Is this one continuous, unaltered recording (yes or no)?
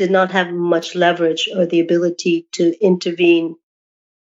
yes